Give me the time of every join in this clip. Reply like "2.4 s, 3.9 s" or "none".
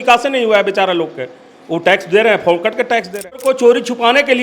3.4 s